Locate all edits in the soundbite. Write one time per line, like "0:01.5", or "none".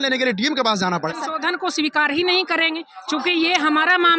0:01.1